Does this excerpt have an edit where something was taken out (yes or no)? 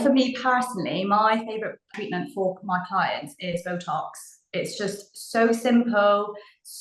yes